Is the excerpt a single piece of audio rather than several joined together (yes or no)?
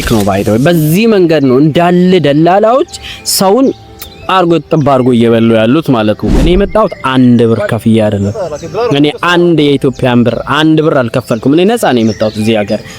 no